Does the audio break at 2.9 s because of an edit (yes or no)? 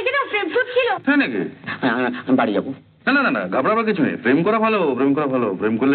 no